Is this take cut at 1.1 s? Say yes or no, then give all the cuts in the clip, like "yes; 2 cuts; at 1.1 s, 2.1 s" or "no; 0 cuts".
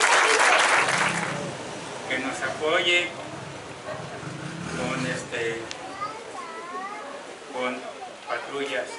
yes; 2 cuts; at 1.1 s, 6.3 s